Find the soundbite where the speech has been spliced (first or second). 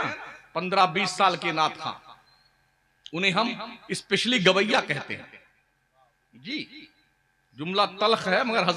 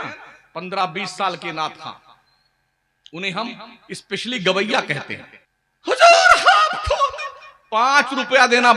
second